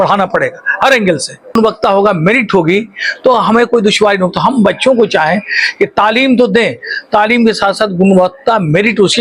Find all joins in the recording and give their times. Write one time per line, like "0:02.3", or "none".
0:01.5